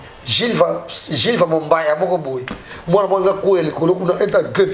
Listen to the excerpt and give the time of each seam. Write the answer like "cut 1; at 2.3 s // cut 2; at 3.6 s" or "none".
none